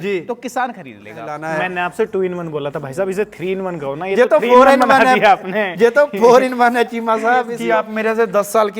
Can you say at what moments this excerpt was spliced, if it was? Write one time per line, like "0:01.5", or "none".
0:01.6
0:07.5